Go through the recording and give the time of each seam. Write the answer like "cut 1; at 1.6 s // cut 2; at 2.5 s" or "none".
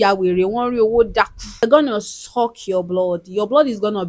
cut 1; at 1.6 s